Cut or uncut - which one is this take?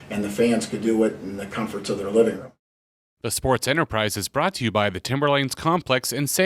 cut